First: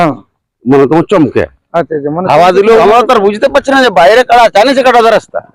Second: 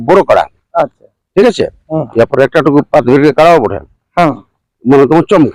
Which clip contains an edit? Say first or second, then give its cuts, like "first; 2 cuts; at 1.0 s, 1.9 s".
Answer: first; 1 cut; at 2.8 s